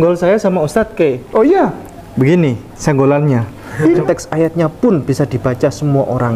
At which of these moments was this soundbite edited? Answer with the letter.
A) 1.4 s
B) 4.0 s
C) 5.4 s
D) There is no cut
B